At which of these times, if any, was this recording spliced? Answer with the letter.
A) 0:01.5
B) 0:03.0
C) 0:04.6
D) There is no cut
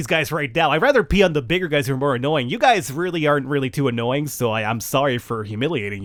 D